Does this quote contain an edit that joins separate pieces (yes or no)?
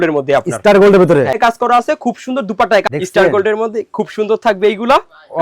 yes